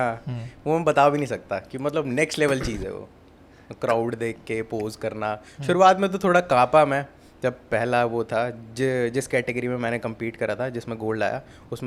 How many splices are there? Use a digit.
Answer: 0